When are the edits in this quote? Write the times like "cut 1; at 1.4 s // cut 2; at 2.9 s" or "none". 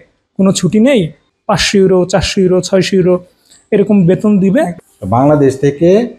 cut 1; at 1.2 s // cut 2; at 4.7 s